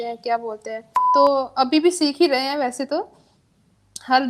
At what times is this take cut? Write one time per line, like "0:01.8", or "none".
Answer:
0:00.9